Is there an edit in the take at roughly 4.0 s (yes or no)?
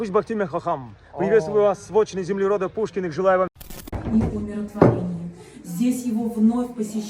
yes